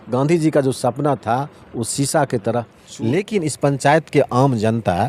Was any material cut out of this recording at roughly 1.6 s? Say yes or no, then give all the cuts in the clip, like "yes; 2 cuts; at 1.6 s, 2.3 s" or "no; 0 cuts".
no; 1 cut; at 2.8 s